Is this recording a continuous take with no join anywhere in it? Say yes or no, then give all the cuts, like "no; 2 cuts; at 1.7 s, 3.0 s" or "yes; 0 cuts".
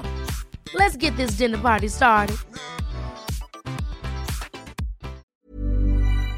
no; 1 cut; at 5.3 s